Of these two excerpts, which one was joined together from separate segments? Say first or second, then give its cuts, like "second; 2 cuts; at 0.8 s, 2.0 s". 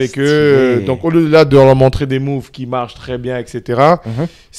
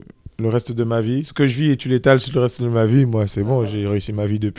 second; 1 cut; at 1.3 s